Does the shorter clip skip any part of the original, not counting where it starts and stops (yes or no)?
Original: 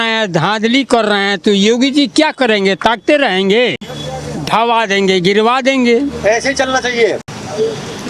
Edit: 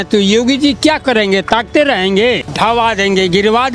yes